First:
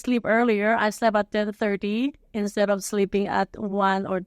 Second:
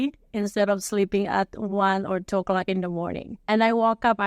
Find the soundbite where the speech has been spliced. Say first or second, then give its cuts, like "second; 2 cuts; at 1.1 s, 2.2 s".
second; 1 cut; at 3.3 s